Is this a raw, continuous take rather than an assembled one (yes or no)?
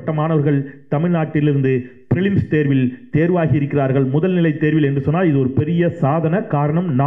yes